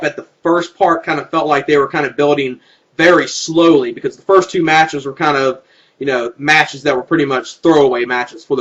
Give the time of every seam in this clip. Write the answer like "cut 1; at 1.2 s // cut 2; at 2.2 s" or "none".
cut 1; at 6.3 s

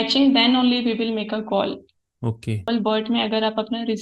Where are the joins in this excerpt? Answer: cut 1; at 2.6 s

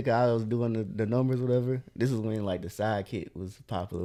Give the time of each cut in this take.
none

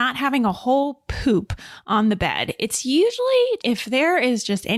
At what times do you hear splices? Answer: none

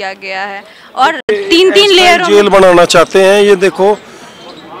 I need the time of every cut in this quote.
none

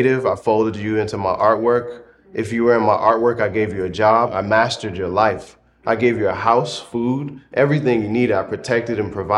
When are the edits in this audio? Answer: cut 1; at 4.3 s

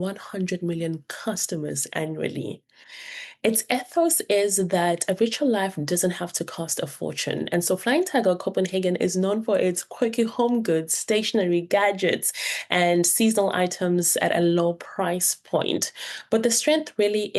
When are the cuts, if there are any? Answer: none

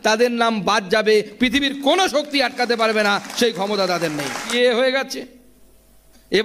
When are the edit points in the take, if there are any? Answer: cut 1; at 4.5 s

